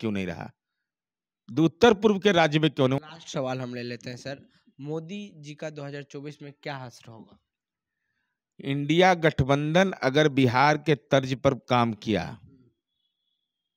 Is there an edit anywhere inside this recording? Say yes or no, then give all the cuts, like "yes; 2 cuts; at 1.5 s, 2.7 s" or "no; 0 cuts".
no; 0 cuts